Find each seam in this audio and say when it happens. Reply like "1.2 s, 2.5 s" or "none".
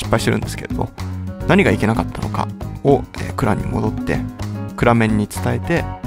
3.8 s